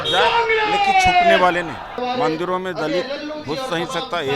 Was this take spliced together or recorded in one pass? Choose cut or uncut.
cut